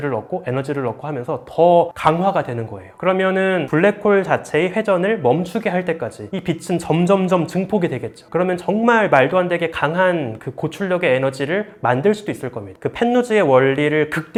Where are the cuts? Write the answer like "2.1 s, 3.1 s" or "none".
none